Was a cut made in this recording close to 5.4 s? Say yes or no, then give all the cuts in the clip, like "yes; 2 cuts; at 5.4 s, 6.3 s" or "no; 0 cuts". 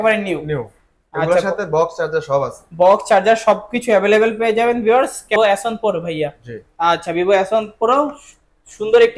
yes; 1 cut; at 5.4 s